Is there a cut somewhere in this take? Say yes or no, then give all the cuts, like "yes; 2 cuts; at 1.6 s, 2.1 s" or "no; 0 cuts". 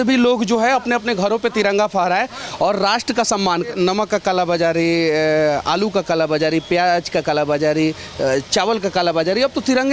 yes; 1 cut; at 3.7 s